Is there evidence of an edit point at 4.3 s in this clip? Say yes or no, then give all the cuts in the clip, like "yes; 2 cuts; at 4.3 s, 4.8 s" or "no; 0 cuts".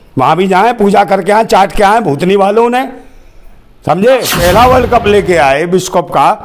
yes; 1 cut; at 4.3 s